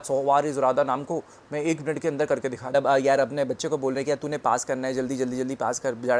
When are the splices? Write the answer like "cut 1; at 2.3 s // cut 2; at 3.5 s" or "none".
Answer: cut 1; at 2.7 s